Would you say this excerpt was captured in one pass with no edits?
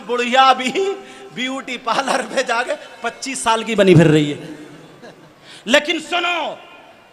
yes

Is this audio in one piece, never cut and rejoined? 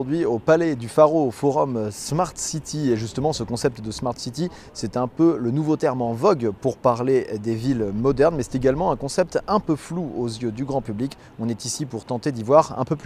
yes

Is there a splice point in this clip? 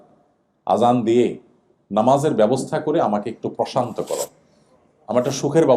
no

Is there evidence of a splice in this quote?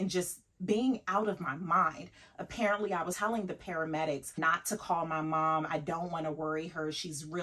yes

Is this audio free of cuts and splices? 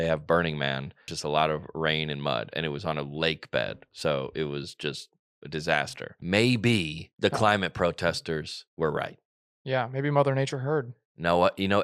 no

